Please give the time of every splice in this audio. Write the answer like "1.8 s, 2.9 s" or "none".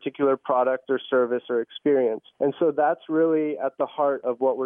2.3 s